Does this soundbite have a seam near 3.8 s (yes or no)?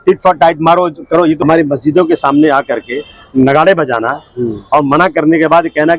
no